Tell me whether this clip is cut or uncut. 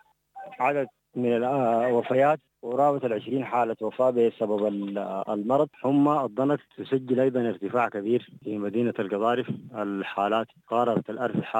cut